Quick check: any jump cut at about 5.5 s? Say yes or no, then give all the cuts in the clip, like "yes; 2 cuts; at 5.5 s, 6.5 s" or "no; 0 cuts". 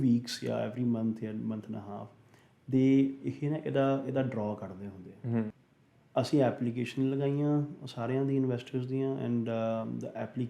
yes; 1 cut; at 5.5 s